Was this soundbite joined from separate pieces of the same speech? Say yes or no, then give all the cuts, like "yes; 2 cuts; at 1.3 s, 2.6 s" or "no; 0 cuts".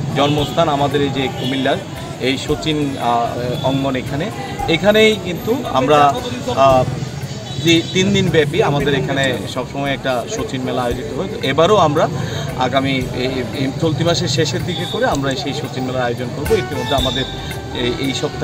no; 0 cuts